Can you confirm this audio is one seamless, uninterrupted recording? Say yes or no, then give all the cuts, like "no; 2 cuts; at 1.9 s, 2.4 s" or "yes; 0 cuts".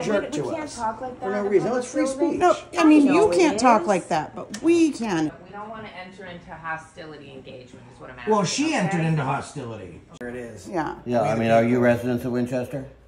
no; 2 cuts; at 5.4 s, 10.1 s